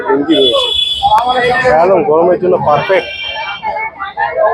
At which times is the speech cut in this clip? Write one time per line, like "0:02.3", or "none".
none